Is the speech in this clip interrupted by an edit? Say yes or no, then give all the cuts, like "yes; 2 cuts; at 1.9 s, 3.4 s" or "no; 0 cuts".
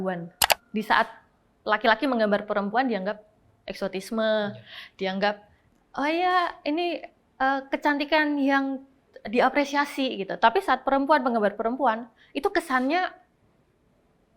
no; 0 cuts